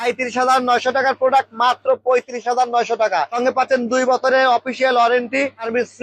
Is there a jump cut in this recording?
no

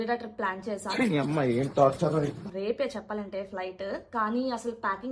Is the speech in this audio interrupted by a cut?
no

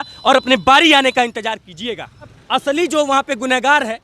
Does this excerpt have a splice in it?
yes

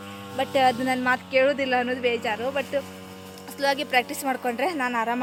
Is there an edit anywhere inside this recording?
no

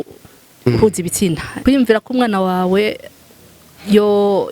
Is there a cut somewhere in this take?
yes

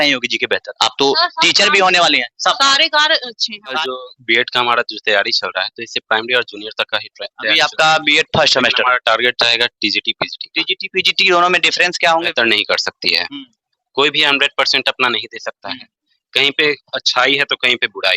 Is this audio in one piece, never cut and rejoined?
no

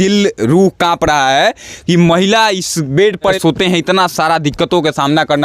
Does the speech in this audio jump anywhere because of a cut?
yes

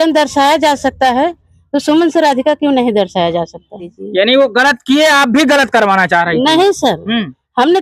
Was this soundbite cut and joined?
yes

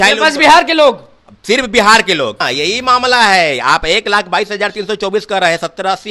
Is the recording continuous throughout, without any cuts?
no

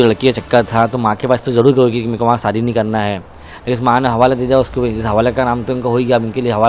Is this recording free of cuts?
yes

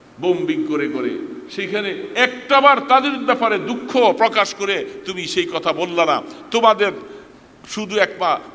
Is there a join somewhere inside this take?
no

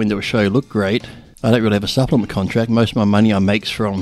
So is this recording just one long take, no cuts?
yes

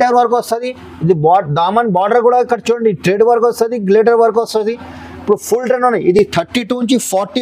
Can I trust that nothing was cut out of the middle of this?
yes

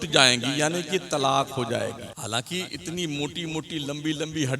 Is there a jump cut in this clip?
yes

